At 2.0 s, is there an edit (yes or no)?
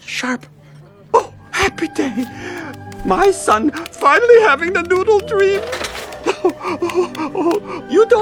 no